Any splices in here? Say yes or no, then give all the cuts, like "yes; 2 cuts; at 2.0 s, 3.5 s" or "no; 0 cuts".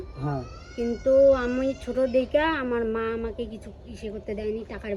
no; 0 cuts